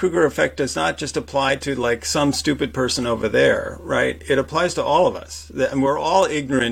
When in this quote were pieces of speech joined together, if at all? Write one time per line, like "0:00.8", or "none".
none